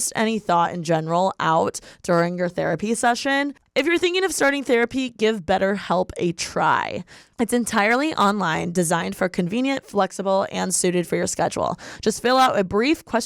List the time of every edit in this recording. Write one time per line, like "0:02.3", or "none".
0:03.6